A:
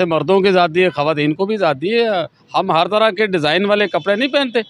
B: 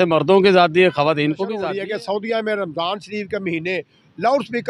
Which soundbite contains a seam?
B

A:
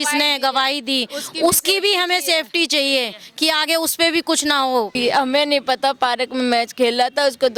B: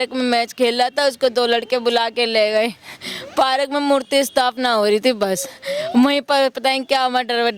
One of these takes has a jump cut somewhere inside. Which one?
A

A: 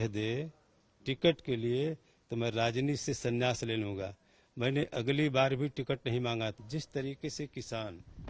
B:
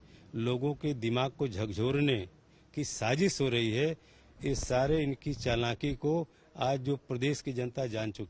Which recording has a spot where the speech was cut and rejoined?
A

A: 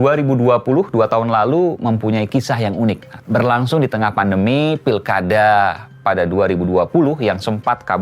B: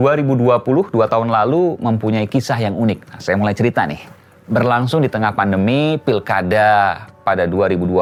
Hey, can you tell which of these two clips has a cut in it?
A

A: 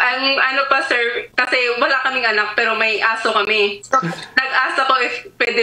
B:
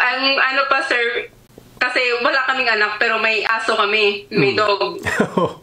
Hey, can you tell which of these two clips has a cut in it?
A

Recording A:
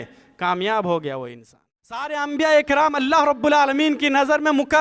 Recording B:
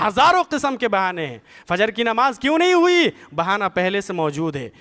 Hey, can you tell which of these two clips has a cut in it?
A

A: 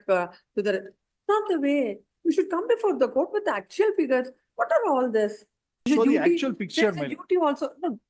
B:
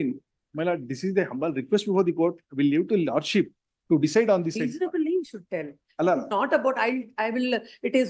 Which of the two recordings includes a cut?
A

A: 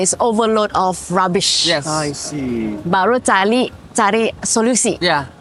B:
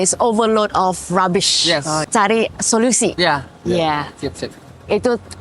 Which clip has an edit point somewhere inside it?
B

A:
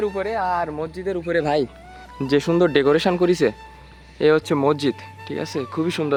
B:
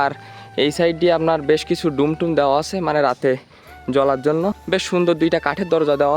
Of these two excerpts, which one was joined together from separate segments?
B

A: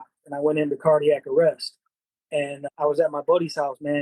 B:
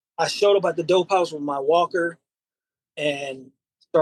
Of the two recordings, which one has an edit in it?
A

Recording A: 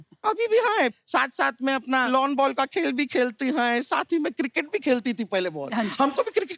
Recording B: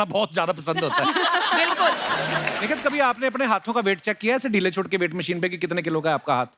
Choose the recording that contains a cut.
B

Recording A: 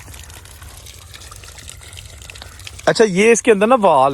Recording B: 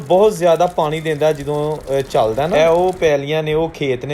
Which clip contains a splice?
B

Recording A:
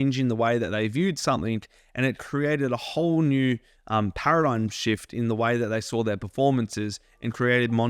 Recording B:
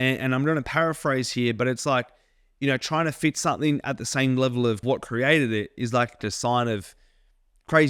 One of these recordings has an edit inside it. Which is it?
B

